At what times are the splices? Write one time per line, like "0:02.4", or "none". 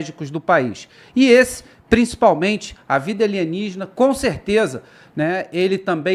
none

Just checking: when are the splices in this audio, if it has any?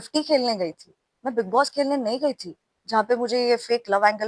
none

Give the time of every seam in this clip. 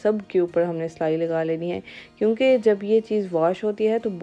none

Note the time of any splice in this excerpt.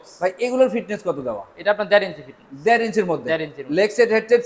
none

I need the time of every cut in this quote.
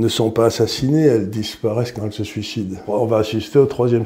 0:02.8

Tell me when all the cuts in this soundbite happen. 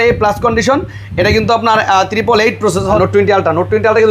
0:03.0

